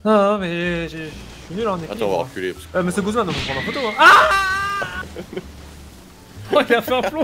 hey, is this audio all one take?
no; 1 cut; at 2.6 s

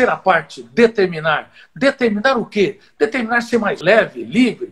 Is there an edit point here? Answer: yes; 1 cut; at 3.8 s

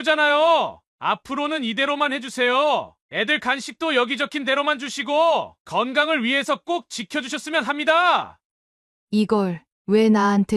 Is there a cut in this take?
no; 0 cuts

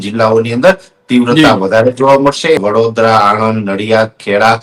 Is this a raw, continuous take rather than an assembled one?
no; 1 cut; at 2.6 s

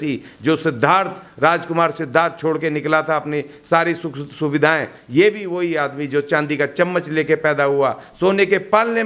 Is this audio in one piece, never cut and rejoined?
yes; 0 cuts

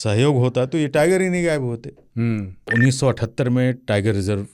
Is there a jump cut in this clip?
yes; 1 cut; at 2.6 s

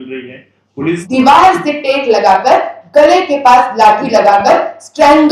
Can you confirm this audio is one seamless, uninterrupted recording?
no; 1 cut; at 1.0 s

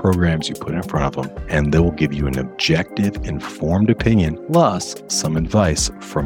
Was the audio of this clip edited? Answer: yes; 2 cuts; at 1.3 s, 4.4 s

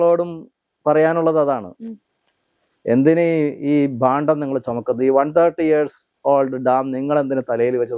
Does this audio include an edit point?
no; 0 cuts

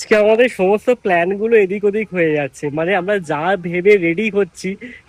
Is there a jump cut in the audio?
no; 0 cuts

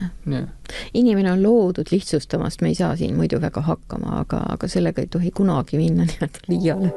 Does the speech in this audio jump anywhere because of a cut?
no; 0 cuts

